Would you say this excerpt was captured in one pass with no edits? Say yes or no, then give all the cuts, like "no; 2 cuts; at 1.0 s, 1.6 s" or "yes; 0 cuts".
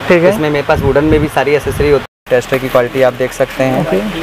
no; 1 cut; at 2.1 s